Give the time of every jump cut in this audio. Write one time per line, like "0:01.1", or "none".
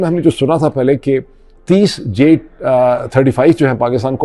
none